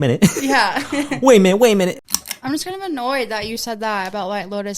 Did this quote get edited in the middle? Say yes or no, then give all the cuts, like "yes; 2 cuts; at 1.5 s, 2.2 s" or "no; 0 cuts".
yes; 1 cut; at 2.1 s